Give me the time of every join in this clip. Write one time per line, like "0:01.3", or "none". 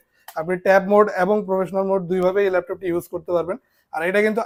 none